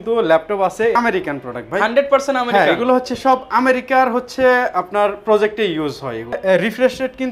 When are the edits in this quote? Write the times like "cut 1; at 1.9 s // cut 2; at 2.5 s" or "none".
cut 1; at 0.9 s // cut 2; at 6.4 s